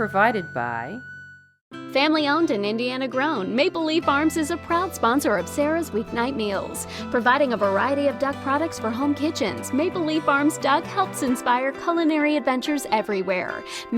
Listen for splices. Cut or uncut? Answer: cut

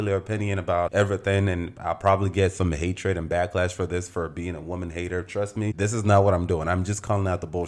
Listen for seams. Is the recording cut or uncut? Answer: uncut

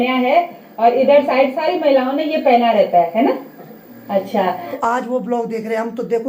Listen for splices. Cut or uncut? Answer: cut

